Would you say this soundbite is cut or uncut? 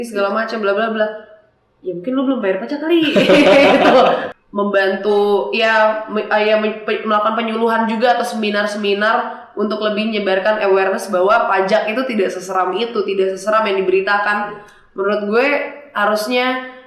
cut